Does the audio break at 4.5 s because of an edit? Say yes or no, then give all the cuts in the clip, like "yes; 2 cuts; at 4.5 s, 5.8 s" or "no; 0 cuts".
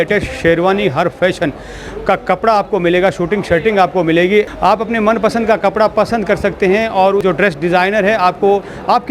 yes; 2 cuts; at 4.5 s, 7.2 s